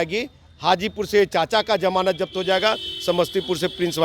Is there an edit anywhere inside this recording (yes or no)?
no